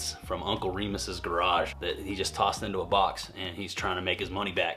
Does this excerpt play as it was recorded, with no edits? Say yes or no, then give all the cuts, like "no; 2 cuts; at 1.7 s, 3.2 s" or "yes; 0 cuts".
yes; 0 cuts